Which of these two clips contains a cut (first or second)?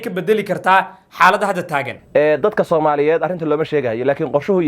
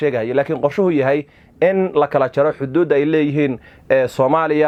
first